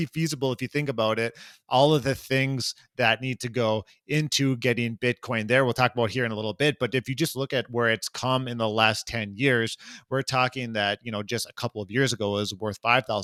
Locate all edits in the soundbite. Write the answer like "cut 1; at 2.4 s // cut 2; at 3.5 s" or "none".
none